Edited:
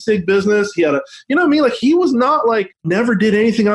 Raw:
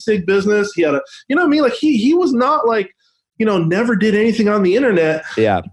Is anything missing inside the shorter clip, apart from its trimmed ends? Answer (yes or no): yes